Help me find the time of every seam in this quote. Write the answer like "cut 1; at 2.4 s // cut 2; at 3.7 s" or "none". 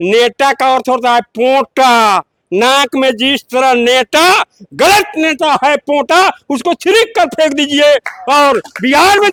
none